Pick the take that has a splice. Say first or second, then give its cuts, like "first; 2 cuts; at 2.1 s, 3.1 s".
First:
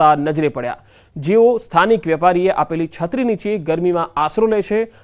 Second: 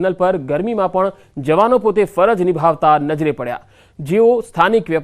second; 1 cut; at 0.9 s